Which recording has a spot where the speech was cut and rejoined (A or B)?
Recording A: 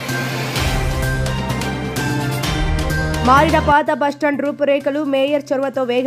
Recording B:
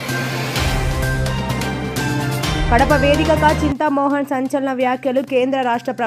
A